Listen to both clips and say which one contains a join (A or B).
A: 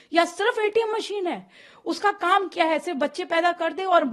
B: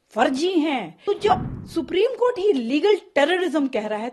B